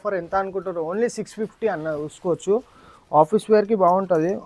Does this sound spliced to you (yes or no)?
no